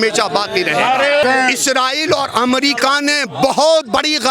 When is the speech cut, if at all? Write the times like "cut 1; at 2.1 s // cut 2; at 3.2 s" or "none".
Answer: cut 1; at 1.2 s